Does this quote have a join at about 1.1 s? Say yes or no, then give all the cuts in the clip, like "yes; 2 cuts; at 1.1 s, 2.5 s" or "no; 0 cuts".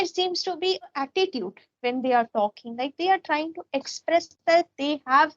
yes; 1 cut; at 1.1 s